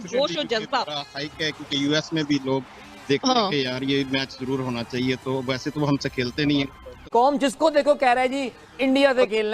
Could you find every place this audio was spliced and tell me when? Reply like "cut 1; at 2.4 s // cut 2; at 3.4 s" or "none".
cut 1; at 7.0 s